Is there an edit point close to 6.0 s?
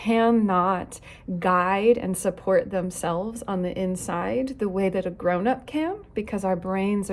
no; 0 cuts

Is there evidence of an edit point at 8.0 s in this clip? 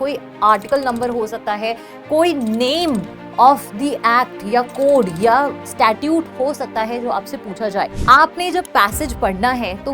yes; 1 cut; at 8.0 s

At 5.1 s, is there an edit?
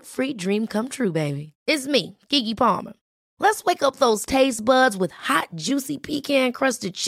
no; 0 cuts

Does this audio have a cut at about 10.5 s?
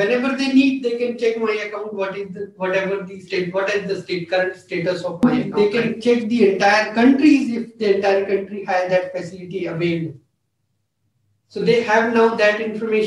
no; 1 cut; at 5.2 s

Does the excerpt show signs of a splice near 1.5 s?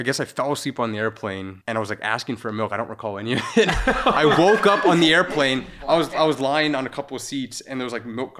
yes; 1 cut; at 1.5 s

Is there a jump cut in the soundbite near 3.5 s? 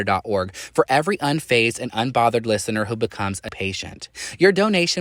yes; 1 cut; at 3.5 s

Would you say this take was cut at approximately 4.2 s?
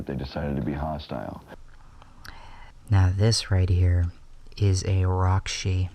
no; 1 cut; at 1.5 s

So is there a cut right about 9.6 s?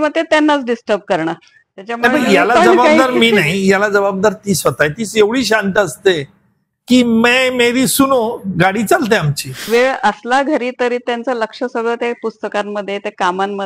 yes; 1 cut; at 9.6 s

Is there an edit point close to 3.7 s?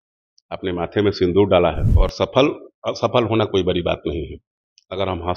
no; 1 cut; at 1.9 s

